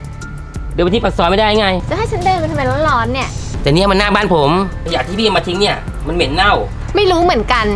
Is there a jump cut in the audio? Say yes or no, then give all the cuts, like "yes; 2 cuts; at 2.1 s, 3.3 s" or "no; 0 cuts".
yes; 4 cuts; at 1.9 s, 3.3 s, 4.8 s, 6.8 s